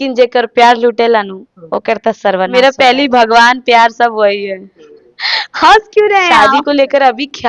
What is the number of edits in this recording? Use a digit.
2